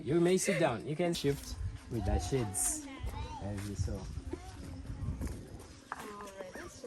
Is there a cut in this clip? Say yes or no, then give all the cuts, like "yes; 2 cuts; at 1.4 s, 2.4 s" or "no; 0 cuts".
yes; 1 cut; at 1.2 s